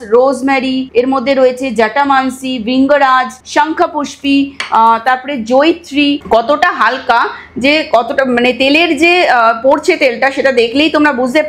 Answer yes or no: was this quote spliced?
yes